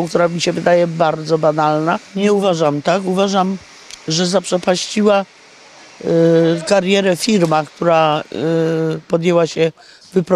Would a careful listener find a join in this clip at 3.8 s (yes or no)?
no